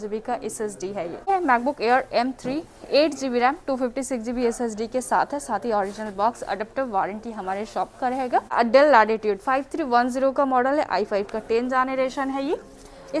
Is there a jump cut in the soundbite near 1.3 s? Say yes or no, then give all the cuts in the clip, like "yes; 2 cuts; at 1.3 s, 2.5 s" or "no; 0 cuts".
yes; 2 cuts; at 1.3 s, 8.5 s